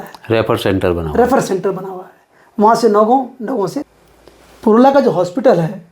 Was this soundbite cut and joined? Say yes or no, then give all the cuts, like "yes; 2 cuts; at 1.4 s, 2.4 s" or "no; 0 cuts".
yes; 1 cut; at 3.8 s